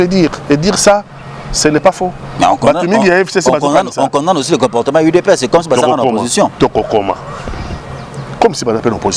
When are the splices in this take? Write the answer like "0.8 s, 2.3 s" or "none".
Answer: none